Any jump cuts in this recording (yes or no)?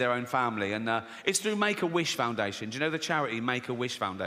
no